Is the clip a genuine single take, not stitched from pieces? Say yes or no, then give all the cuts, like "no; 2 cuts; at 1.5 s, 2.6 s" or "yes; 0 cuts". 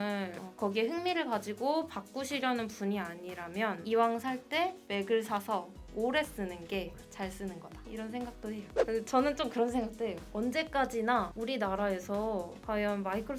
no; 1 cut; at 8.7 s